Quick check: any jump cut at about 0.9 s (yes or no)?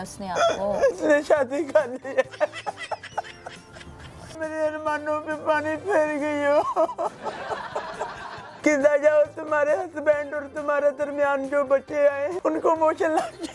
yes